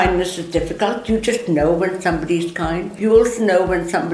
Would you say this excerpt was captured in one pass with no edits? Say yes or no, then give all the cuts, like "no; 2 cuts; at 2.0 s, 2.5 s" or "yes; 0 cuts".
no; 1 cut; at 2.9 s